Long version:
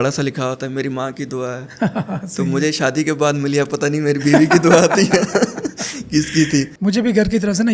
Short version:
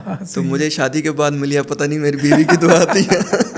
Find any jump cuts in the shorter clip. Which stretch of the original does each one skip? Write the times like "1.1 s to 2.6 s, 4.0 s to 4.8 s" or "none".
none